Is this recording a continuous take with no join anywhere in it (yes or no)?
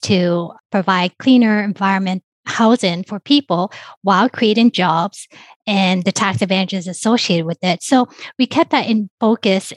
yes